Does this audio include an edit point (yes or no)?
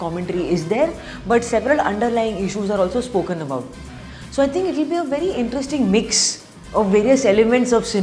no